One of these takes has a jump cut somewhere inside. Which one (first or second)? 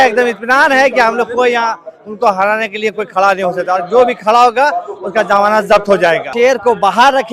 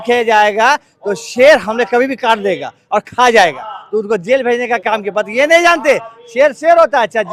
first